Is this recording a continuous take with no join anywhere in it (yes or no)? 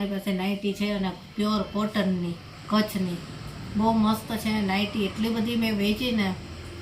yes